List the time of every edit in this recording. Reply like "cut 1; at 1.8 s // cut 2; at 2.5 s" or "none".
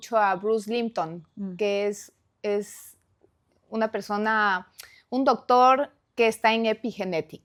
none